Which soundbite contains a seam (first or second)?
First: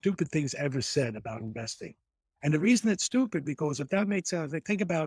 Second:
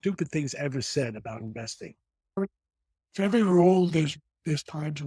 second